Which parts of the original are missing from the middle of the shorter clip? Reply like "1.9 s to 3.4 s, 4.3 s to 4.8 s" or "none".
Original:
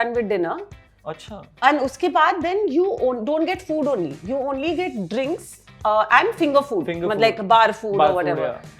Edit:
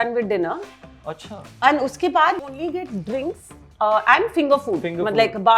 2.4 s to 4.4 s

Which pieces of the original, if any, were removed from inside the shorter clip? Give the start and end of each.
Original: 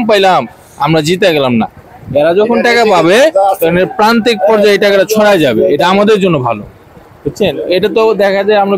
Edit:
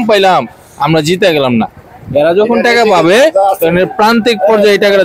none

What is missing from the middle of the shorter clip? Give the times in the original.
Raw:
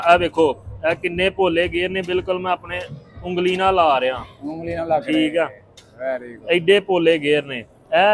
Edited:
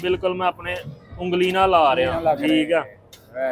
4.2 s to 4.8 s

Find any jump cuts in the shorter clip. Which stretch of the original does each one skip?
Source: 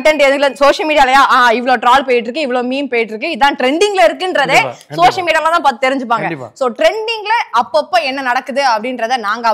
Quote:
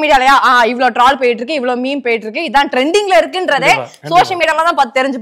none

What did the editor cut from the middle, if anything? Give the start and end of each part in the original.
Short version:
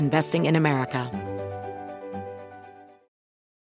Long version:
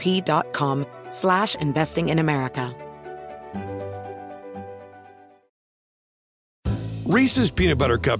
2.7 s to 3.5 s

